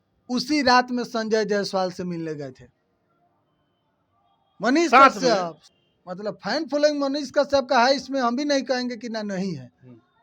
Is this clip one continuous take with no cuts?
no; 1 cut; at 5.6 s

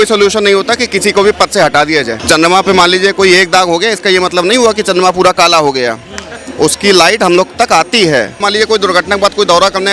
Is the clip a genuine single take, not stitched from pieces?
no; 2 cuts; at 2.2 s, 8.4 s

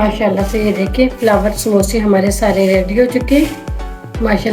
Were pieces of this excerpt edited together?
no; 0 cuts

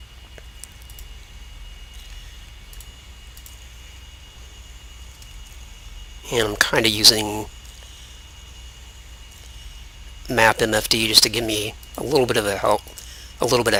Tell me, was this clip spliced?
no; 0 cuts

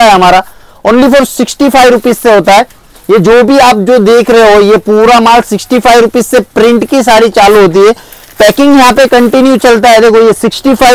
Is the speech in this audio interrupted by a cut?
no; 0 cuts

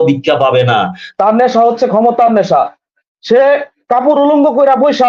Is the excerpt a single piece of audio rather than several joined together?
no; 1 cut; at 1.0 s

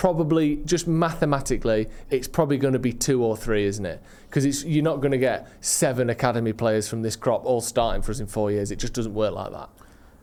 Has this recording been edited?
no; 0 cuts

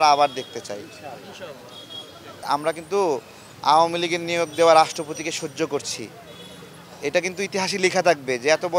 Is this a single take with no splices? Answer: no; 1 cut; at 2.4 s

